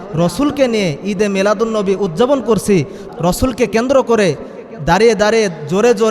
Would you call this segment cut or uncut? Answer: cut